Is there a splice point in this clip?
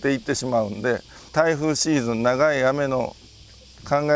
yes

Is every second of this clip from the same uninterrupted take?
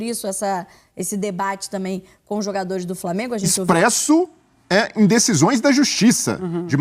no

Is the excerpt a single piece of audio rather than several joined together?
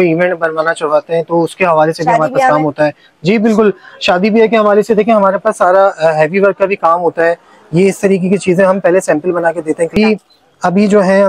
no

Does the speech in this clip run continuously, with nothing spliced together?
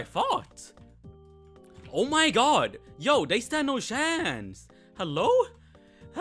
yes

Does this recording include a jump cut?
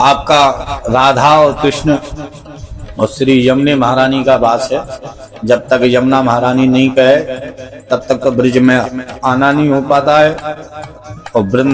no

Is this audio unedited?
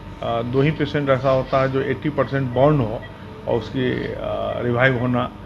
yes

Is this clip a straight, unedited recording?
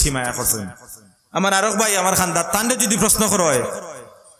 yes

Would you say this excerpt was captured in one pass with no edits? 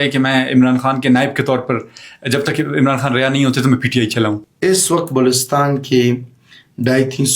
no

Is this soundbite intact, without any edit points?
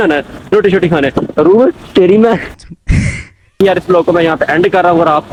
yes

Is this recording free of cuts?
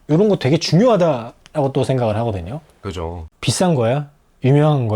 no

